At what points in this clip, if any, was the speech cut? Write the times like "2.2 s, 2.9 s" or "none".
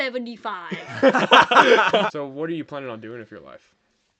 2.1 s